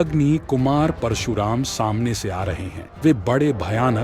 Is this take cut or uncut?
uncut